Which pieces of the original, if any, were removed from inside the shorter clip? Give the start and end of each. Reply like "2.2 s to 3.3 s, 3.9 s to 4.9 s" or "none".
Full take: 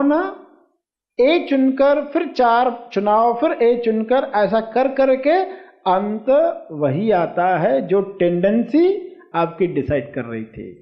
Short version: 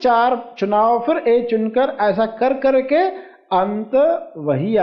none